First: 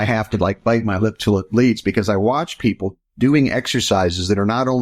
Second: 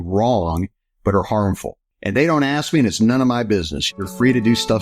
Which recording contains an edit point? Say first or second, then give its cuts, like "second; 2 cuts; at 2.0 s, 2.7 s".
second; 1 cut; at 3.9 s